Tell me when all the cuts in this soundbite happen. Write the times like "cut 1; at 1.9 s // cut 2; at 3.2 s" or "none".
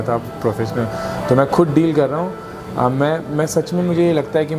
none